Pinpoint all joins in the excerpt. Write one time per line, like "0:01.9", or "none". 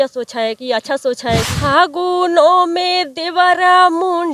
0:01.5